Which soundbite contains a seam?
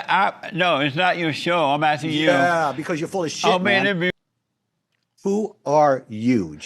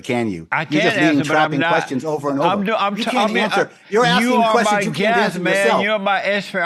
first; 1 cut; at 4.1 s

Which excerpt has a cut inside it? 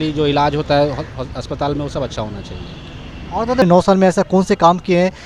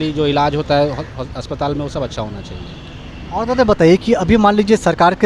first; 1 cut; at 3.6 s

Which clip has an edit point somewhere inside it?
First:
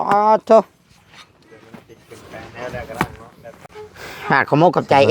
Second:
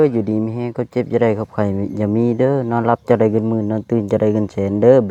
first; 1 cut; at 3.6 s

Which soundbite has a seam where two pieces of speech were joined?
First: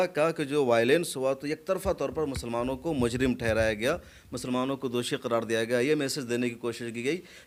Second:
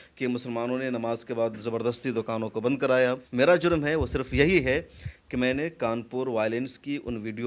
second; 1 cut; at 3.2 s

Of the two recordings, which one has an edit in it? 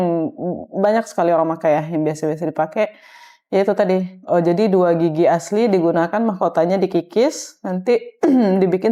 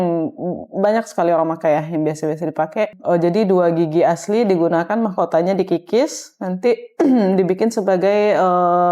second; 1 cut; at 3.0 s

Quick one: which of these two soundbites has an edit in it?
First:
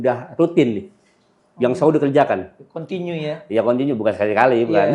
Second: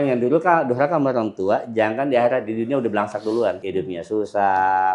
second; 1 cut; at 3.6 s

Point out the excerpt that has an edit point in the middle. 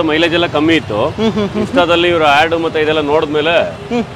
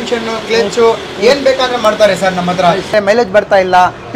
second; 1 cut; at 2.9 s

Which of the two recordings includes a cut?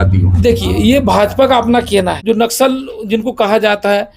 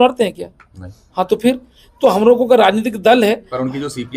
first; 1 cut; at 2.1 s

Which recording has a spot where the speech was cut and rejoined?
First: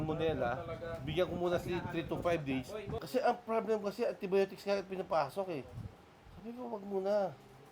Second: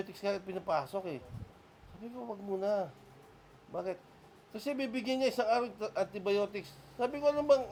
first; 1 cut; at 3.0 s

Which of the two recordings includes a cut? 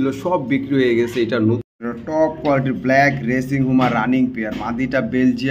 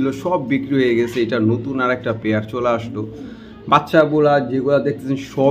first; 1 cut; at 1.7 s

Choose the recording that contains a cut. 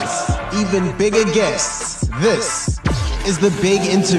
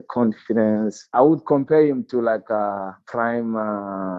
second; 2 cuts; at 1.0 s, 3.1 s

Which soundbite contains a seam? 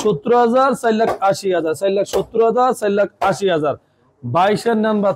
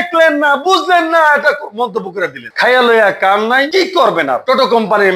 second; 2 cuts; at 3.7 s, 4.4 s

